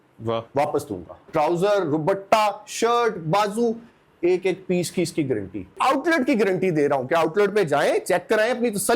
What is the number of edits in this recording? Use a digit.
2